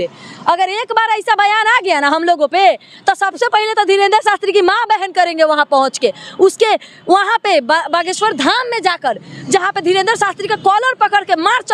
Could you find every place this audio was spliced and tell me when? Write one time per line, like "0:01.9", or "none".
none

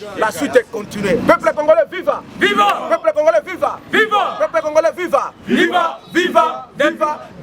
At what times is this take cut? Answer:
none

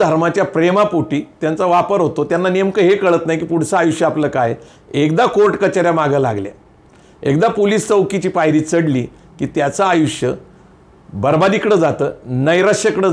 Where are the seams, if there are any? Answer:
none

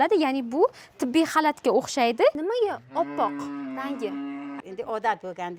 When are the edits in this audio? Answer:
0:02.3
0:04.6

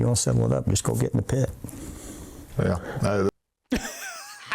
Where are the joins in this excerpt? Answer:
none

